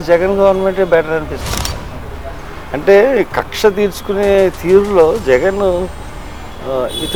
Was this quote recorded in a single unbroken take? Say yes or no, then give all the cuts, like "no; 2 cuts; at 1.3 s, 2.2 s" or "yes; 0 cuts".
yes; 0 cuts